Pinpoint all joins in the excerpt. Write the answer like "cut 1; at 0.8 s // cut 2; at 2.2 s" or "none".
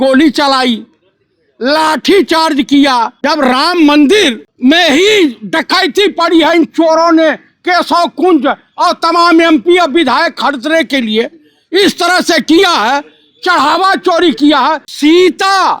cut 1; at 3.2 s // cut 2; at 4.5 s // cut 3; at 14.9 s

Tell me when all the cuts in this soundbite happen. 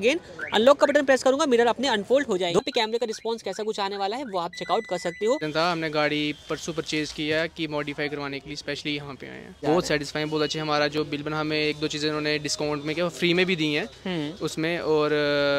cut 1; at 2.6 s // cut 2; at 5.4 s // cut 3; at 9.6 s

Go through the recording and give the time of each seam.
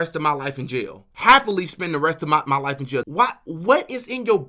cut 1; at 1.0 s // cut 2; at 3.0 s

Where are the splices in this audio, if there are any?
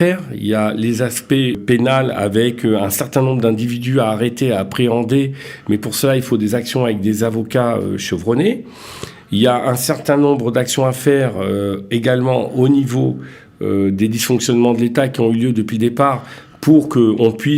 cut 1; at 1.6 s

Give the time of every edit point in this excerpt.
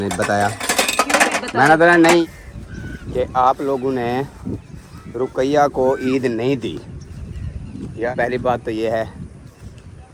cut 1; at 2.2 s // cut 2; at 8.1 s

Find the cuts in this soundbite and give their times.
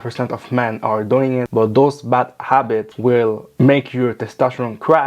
cut 1; at 1.5 s // cut 2; at 2.9 s

